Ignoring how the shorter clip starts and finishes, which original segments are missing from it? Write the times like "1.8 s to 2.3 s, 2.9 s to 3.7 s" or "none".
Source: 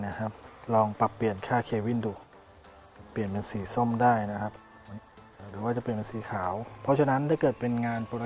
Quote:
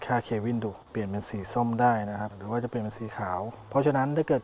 2.2 s to 3.0 s, 4.6 s to 5.5 s